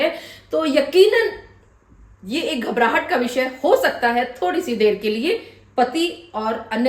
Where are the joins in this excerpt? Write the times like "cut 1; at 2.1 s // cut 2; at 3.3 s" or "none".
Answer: none

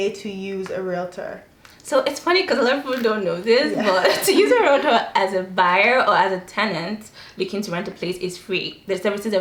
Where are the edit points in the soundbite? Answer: none

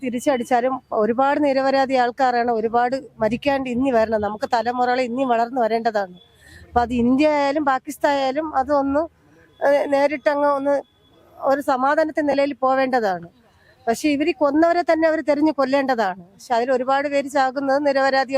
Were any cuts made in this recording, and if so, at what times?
none

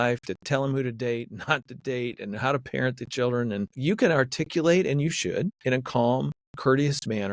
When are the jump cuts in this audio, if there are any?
cut 1; at 3.7 s // cut 2; at 5.5 s // cut 3; at 6.4 s

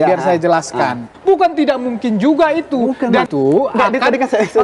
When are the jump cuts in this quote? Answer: cut 1; at 1.1 s // cut 2; at 3.3 s

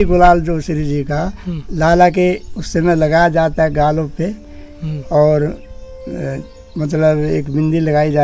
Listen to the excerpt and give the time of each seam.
none

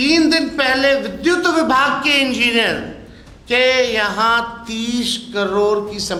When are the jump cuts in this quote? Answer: none

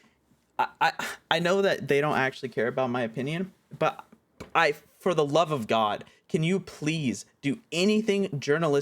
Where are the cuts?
none

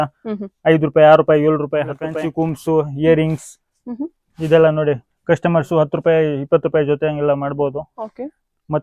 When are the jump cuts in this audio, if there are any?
cut 1; at 2.1 s

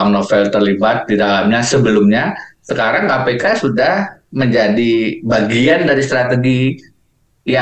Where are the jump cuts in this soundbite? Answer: none

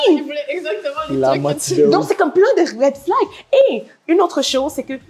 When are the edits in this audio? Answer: none

